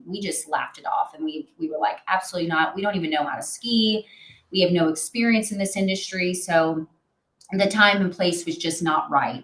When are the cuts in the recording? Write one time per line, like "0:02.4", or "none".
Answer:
none